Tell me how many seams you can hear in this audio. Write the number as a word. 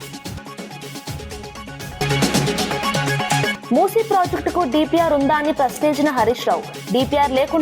two